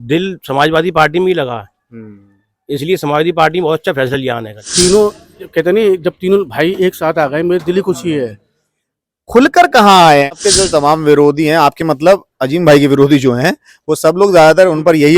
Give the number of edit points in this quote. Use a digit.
2